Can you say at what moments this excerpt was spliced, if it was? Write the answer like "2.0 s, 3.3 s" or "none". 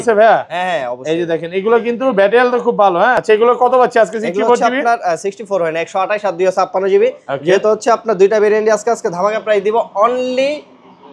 3.2 s